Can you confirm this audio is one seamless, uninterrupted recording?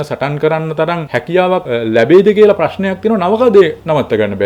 no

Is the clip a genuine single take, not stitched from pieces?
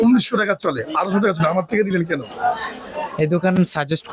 yes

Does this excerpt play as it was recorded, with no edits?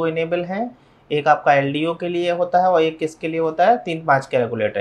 yes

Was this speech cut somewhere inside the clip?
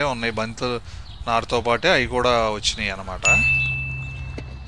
yes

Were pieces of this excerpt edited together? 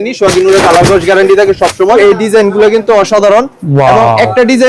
yes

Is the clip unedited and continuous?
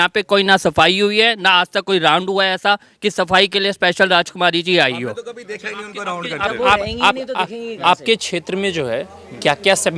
yes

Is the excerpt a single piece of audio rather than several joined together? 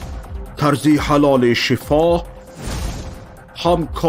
yes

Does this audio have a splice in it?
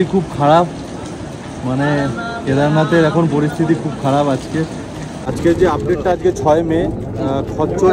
yes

